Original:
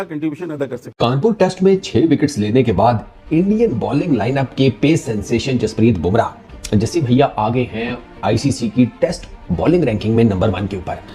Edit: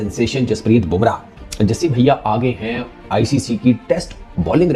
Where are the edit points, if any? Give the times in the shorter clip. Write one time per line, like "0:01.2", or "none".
none